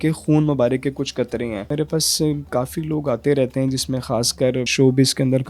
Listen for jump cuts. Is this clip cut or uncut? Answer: cut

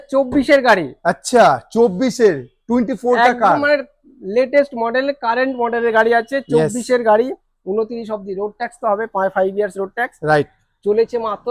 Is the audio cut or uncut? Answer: uncut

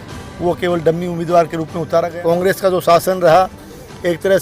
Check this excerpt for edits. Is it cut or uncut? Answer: cut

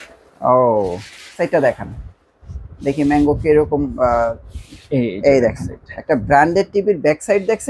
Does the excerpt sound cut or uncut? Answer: cut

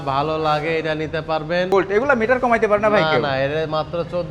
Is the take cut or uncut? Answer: cut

